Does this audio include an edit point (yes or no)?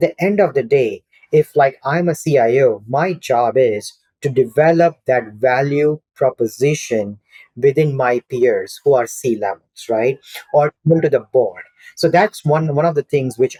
no